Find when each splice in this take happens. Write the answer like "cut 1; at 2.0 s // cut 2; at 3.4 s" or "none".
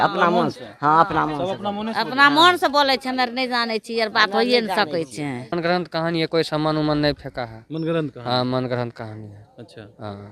cut 1; at 5.5 s